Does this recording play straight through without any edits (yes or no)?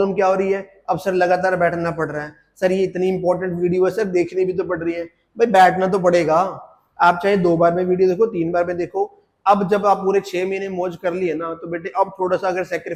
yes